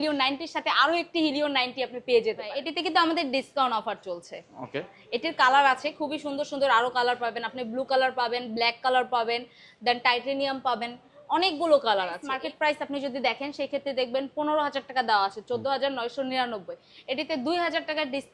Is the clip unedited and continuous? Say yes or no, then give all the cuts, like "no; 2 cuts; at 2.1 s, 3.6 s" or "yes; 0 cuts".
no; 2 cuts; at 2.7 s, 12.3 s